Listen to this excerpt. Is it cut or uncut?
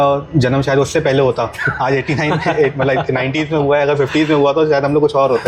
uncut